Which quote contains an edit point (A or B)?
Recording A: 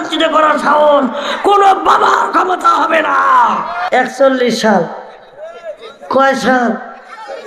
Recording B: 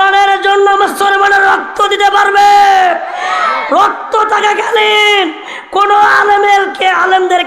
A